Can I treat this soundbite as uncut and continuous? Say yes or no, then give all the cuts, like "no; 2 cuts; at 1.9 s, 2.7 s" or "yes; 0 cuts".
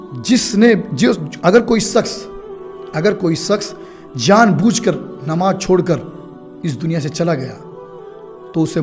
yes; 0 cuts